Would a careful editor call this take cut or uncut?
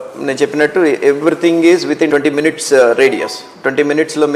cut